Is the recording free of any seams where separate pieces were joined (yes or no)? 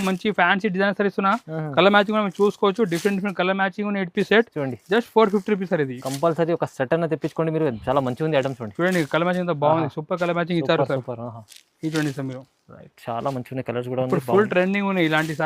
yes